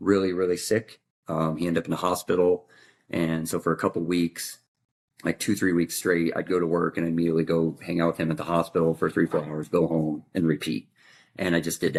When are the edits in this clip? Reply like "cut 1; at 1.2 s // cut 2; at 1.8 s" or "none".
none